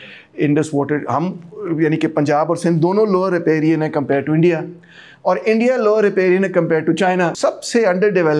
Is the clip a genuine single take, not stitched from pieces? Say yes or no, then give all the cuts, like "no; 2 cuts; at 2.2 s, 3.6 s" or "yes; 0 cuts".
no; 1 cut; at 7.3 s